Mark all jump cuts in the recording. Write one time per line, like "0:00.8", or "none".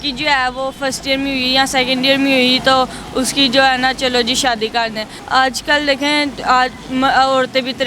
0:05.1